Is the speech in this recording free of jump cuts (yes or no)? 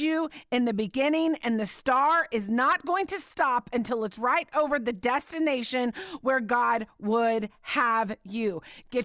yes